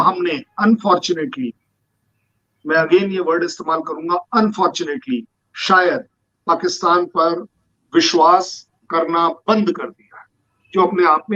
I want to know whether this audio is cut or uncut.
uncut